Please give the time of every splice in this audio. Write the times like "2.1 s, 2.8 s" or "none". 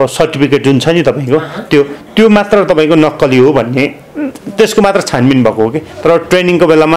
none